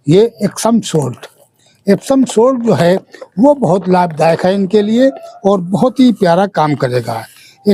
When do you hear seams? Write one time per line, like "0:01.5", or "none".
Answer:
none